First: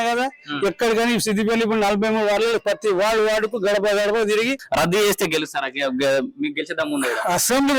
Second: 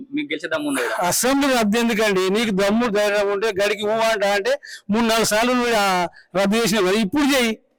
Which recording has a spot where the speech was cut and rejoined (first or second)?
first